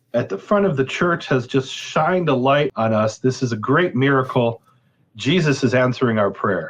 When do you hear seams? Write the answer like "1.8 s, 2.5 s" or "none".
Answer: 2.7 s